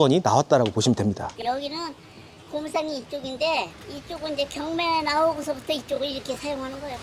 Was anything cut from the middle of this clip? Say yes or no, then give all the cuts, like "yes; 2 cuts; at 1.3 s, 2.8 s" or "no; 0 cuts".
yes; 1 cut; at 1.3 s